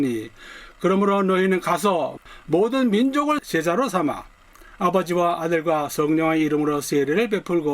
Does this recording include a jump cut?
yes; 2 cuts; at 2.2 s, 3.4 s

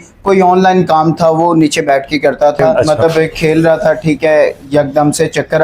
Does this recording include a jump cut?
yes; 1 cut; at 2.9 s

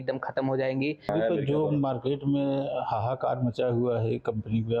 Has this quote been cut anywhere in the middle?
no; 0 cuts

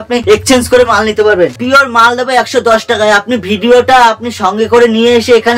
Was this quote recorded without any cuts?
no; 1 cut; at 1.6 s

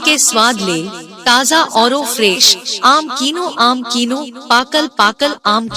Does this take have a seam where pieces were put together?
no; 0 cuts

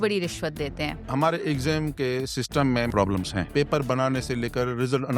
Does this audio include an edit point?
yes; 2 cuts; at 1.1 s, 2.9 s

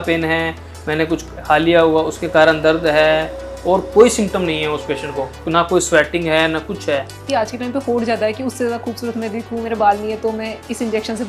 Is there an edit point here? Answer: yes; 1 cut; at 7.2 s

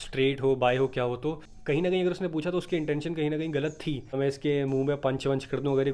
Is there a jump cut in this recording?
yes; 2 cuts; at 1.5 s, 4.2 s

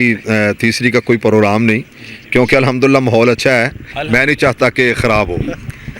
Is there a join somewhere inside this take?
no; 0 cuts

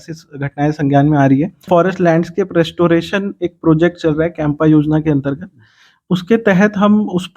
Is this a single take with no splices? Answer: no; 1 cut; at 1.7 s

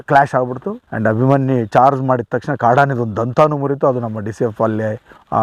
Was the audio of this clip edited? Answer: no; 0 cuts

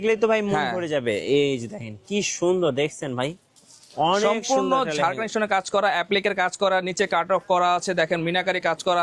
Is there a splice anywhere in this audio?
no; 0 cuts

